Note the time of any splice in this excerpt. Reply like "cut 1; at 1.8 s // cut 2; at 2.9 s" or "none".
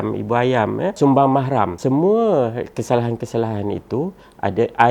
cut 1; at 1.0 s // cut 2; at 1.8 s